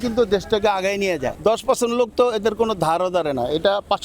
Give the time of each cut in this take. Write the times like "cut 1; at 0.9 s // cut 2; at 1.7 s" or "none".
cut 1; at 1.3 s